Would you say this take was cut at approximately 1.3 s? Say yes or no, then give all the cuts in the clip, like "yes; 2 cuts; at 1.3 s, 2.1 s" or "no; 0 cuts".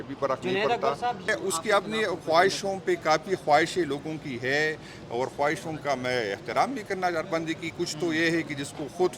yes; 1 cut; at 1.3 s